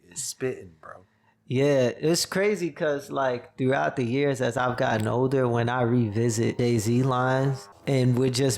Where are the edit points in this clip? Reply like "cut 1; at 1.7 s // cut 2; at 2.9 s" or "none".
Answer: cut 1; at 6.5 s // cut 2; at 7.7 s